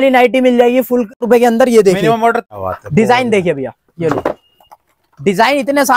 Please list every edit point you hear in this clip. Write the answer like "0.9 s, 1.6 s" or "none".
1.2 s, 2.5 s